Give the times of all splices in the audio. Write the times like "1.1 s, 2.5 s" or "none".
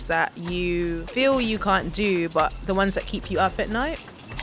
1.0 s